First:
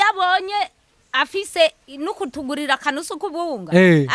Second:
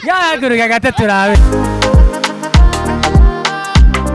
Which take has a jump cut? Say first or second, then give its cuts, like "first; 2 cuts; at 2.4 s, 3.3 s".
second; 1 cut; at 1.4 s